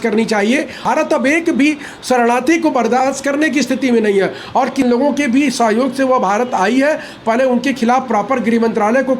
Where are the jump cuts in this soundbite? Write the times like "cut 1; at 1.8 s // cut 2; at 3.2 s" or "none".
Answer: cut 1; at 0.8 s // cut 2; at 4.9 s